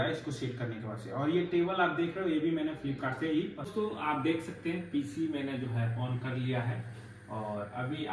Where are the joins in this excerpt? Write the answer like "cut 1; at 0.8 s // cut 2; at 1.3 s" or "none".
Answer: cut 1; at 3.7 s